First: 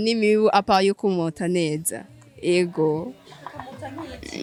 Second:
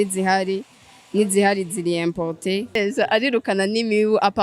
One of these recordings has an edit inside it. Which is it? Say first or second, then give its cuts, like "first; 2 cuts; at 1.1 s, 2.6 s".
second; 1 cut; at 2.8 s